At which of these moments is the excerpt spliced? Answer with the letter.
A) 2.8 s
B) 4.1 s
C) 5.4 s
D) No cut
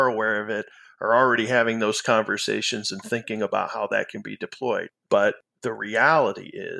C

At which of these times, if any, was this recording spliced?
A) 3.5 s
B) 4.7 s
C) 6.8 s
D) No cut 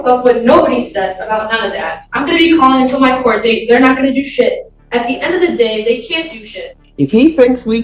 C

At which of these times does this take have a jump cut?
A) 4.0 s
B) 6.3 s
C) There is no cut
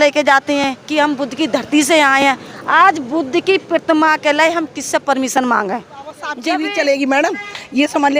B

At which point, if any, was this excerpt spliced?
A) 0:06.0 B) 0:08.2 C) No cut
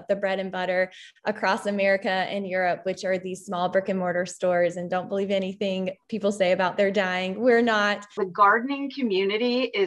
B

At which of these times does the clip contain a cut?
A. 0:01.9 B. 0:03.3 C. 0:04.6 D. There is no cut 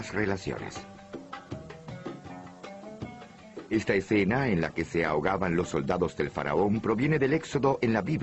A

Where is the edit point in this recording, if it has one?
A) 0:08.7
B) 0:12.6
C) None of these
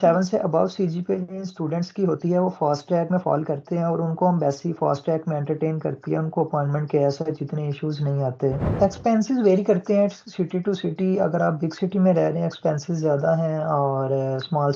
A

